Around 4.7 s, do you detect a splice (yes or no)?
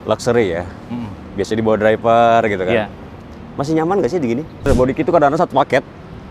yes